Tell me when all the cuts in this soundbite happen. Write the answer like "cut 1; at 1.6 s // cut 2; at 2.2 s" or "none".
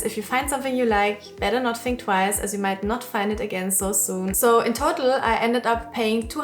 cut 1; at 4.4 s